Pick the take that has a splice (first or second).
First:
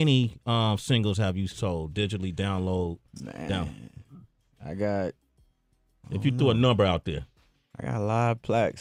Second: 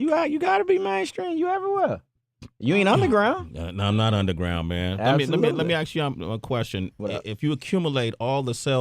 second